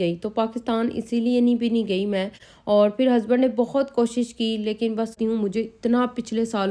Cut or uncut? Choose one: cut